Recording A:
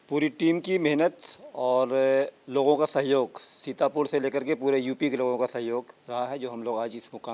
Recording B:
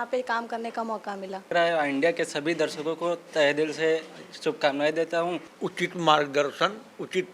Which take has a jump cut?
B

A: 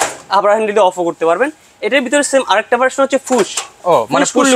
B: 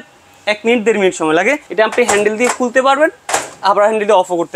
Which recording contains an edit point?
B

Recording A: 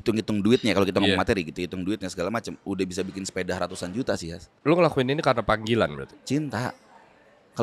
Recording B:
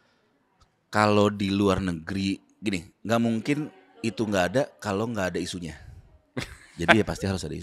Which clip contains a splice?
A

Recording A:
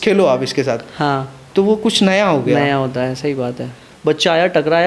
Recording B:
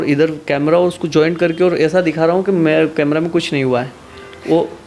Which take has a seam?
A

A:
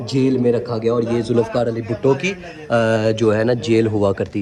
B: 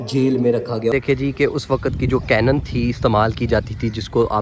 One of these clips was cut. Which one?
B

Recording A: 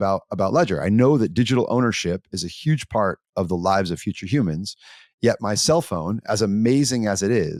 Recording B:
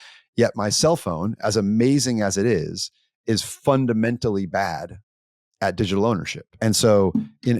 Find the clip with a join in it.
B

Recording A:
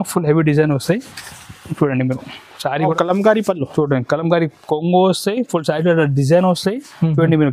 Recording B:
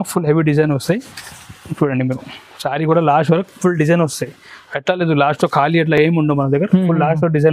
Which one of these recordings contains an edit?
A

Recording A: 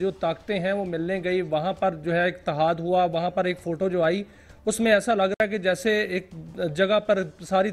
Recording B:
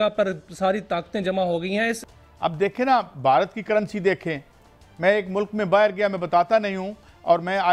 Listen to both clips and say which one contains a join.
B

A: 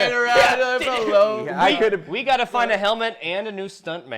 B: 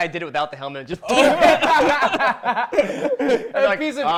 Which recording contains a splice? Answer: A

